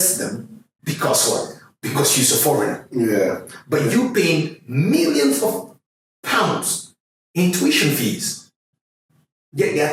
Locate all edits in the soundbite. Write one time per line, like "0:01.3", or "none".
none

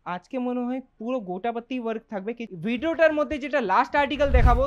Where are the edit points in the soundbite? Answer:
0:02.5

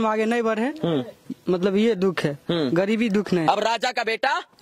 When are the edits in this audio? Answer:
0:03.5

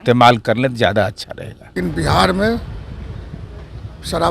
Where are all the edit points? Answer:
0:01.6

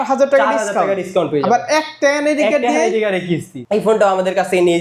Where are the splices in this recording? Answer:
0:03.6

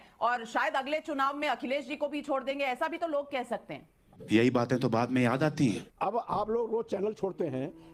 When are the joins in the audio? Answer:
none

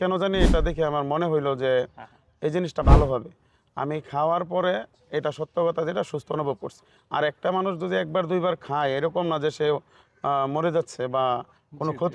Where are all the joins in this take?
none

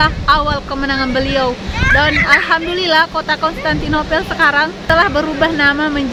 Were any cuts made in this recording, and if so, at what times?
none

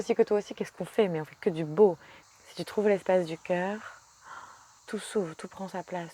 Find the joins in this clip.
0:02.1
0:04.8

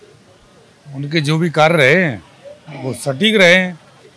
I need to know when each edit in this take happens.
none

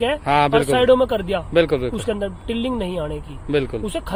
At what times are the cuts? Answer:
none

